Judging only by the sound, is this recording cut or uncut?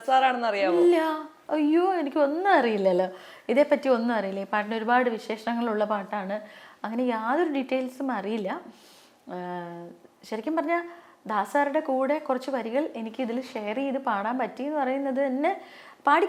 uncut